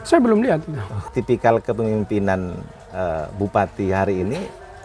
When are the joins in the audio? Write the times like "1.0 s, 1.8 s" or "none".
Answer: 1.0 s